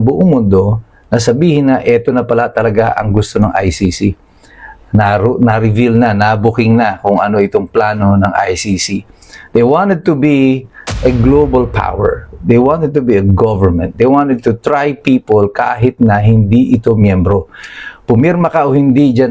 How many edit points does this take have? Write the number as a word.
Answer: zero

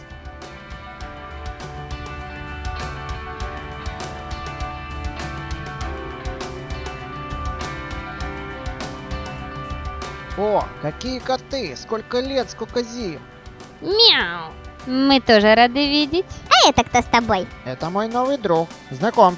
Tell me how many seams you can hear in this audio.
one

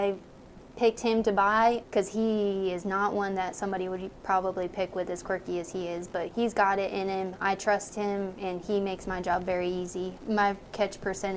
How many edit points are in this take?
three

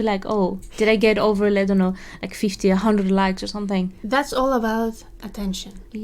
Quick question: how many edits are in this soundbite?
one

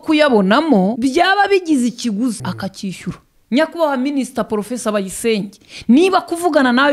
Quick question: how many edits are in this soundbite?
two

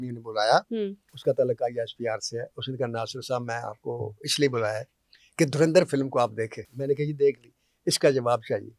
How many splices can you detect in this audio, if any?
two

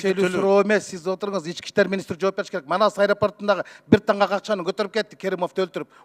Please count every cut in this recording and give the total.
zero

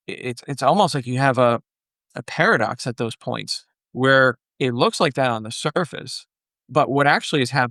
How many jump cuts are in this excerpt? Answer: zero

